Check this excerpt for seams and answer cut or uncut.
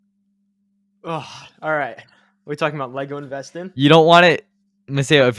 uncut